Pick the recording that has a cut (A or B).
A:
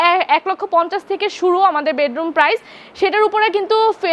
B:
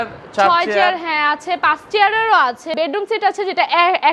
B